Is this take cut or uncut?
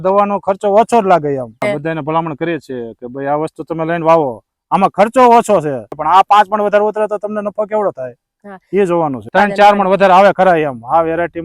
cut